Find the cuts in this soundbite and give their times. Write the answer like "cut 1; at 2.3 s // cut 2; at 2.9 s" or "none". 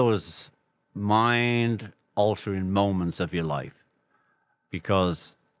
none